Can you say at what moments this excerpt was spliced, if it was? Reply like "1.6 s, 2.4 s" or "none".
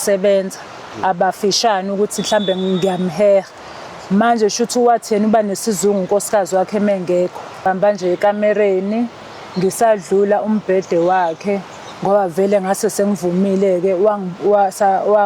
7.6 s